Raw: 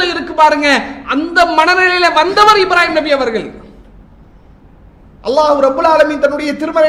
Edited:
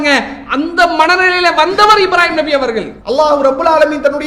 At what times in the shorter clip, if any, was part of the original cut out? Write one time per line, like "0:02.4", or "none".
0:02.9